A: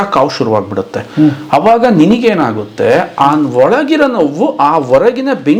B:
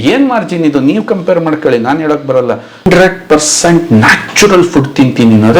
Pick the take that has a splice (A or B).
B